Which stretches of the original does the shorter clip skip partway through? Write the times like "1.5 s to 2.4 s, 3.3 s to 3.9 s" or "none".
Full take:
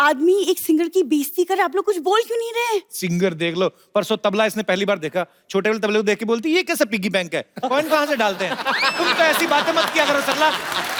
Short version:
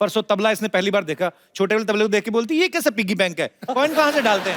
none